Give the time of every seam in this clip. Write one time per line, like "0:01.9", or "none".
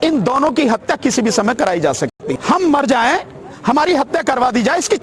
0:02.3